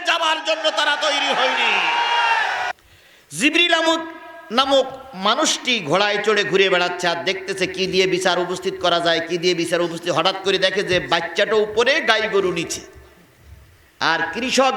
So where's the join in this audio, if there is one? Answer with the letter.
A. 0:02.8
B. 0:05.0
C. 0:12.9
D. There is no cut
A